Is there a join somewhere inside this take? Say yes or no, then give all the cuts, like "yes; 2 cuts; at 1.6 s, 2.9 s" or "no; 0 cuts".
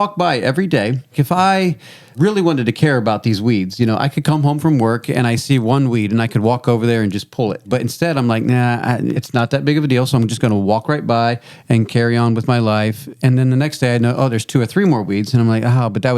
yes; 4 cuts; at 1.1 s, 2.1 s, 7.7 s, 9.2 s